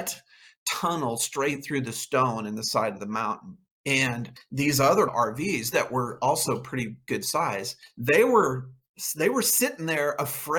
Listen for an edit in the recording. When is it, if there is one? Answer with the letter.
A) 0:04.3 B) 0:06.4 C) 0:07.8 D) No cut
D